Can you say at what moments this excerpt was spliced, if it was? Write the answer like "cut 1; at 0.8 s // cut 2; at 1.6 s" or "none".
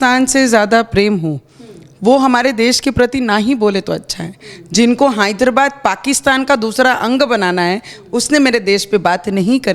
none